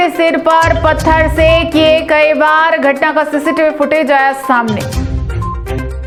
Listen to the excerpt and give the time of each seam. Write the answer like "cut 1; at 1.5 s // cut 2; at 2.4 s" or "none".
none